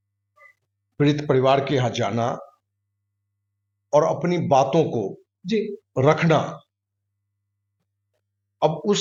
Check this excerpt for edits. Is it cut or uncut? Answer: uncut